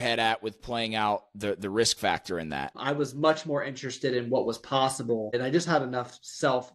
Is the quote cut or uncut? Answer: cut